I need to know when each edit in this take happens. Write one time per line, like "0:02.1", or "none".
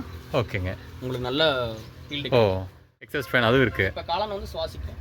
0:03.1